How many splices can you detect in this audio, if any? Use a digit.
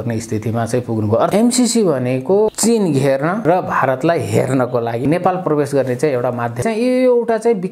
5